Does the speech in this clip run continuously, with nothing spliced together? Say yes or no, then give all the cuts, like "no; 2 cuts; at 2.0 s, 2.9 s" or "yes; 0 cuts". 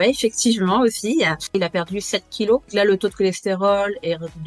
no; 2 cuts; at 1.5 s, 2.7 s